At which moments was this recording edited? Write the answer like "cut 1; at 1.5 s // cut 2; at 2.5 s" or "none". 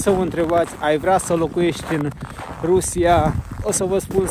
none